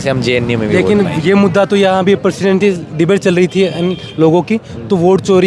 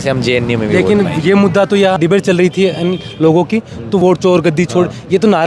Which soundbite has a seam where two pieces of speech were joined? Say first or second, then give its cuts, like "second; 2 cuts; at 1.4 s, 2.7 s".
second; 2 cuts; at 2.0 s, 4.0 s